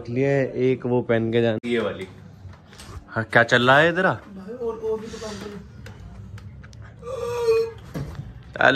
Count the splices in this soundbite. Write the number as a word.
one